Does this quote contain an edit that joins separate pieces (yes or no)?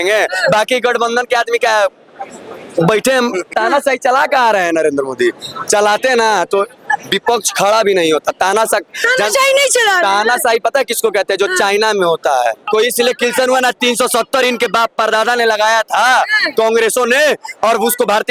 yes